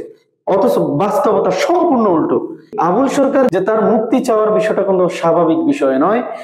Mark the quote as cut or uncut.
cut